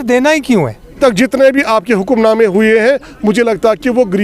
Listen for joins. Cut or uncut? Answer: cut